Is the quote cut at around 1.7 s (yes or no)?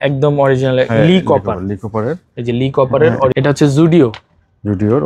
no